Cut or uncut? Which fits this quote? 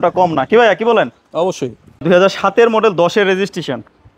cut